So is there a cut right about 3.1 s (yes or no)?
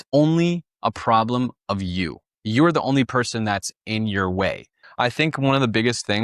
no